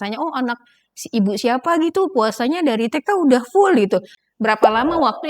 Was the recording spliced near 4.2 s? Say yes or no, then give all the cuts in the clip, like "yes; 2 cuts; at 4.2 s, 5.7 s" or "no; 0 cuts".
yes; 1 cut; at 4.2 s